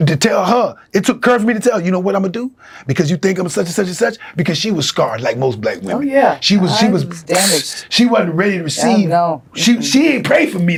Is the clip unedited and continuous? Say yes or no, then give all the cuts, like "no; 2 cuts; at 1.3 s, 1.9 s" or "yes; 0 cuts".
yes; 0 cuts